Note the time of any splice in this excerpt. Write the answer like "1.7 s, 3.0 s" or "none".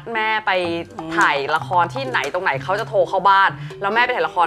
none